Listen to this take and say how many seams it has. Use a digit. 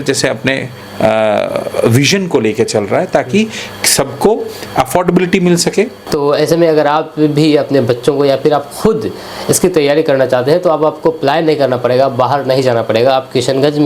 1